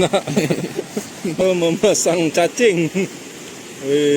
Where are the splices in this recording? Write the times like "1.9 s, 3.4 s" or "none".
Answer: 1.4 s